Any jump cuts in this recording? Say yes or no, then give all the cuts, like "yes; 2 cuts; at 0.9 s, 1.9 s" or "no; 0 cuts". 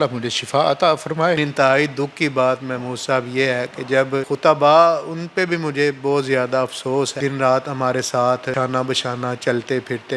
yes; 4 cuts; at 1.4 s, 4.3 s, 7.1 s, 8.5 s